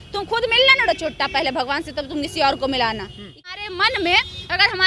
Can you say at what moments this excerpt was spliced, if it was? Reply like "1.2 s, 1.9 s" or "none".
3.4 s